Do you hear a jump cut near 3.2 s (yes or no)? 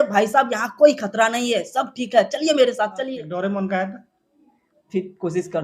yes